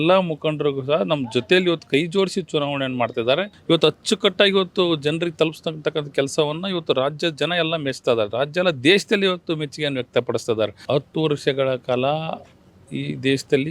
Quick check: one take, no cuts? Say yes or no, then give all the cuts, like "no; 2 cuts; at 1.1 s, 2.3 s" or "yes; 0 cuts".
no; 2 cuts; at 3.5 s, 10.8 s